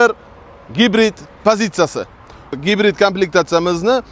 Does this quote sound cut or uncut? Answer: cut